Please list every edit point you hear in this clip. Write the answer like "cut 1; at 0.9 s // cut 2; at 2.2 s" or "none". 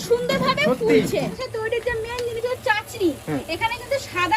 cut 1; at 1.3 s